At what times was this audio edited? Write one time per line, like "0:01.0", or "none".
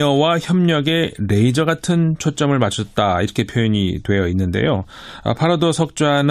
0:02.2